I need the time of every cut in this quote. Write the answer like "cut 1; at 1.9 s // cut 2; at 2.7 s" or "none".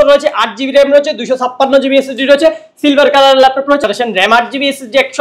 cut 1; at 3.8 s